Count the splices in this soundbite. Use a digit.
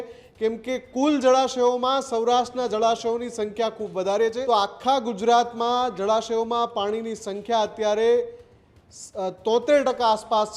1